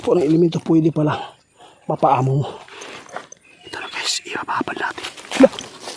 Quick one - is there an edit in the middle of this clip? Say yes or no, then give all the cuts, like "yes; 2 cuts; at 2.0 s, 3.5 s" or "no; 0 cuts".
yes; 1 cut; at 5.0 s